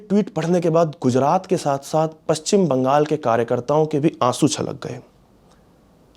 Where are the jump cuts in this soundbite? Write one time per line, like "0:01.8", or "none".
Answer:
none